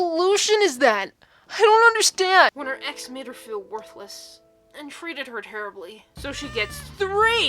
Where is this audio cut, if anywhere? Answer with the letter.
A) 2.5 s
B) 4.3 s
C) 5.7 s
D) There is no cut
A